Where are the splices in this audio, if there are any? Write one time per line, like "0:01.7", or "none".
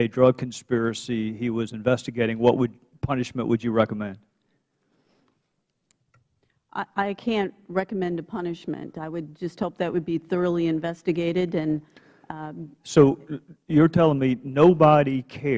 none